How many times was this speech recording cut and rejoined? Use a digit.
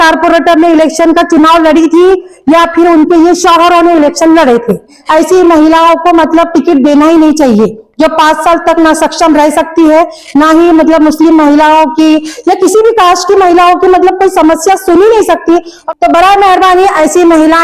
2